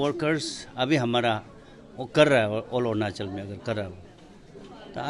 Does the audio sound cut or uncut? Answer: uncut